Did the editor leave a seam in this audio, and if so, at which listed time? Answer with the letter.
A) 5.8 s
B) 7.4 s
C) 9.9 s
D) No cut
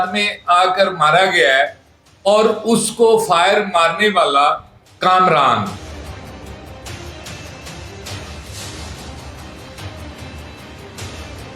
A